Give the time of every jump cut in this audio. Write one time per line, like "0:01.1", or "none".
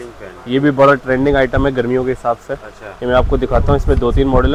none